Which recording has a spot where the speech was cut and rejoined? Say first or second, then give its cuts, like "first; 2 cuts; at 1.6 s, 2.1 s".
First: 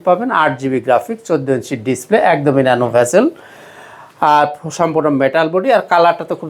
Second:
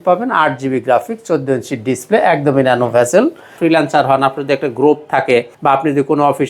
second; 2 cuts; at 3.5 s, 5.5 s